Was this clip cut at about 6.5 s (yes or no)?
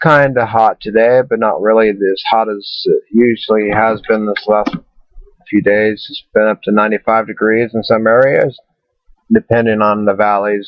no